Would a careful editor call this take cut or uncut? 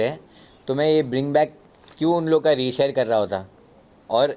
uncut